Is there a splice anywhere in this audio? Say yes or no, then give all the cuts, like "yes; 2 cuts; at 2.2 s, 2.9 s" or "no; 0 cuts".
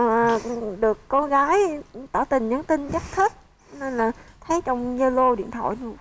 no; 0 cuts